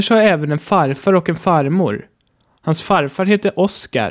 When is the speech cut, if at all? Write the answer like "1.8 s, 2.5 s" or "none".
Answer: 2.2 s